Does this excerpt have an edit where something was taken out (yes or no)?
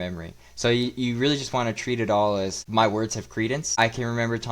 yes